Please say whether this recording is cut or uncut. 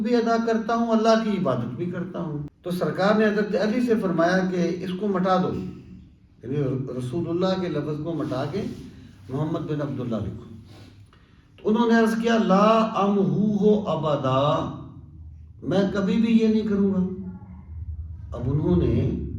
cut